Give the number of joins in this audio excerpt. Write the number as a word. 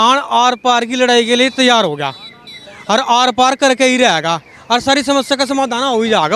zero